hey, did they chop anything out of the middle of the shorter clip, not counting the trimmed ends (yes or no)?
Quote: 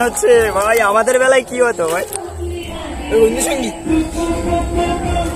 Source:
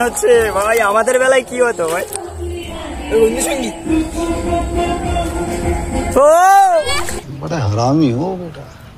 no